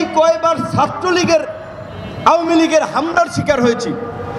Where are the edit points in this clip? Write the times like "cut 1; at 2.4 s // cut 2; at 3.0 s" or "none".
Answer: none